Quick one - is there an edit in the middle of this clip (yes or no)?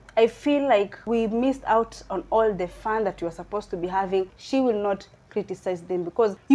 yes